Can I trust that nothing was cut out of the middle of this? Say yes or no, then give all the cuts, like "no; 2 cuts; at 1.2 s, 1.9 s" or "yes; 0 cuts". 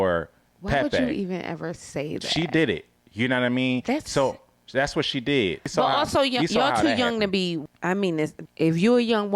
no; 3 cuts; at 5.7 s, 7.7 s, 8.4 s